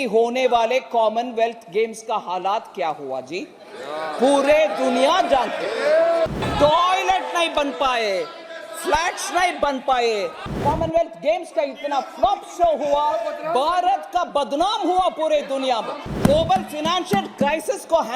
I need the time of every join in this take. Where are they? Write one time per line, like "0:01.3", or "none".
0:06.4
0:10.6
0:16.1